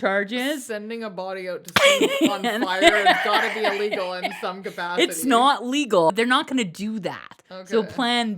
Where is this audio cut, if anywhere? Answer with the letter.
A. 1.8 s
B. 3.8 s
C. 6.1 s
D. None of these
C